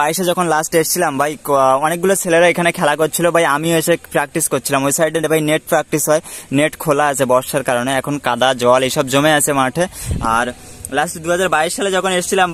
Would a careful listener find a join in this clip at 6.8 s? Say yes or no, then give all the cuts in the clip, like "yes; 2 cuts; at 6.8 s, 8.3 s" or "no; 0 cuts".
no; 0 cuts